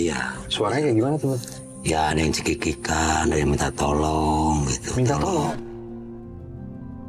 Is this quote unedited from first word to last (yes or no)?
no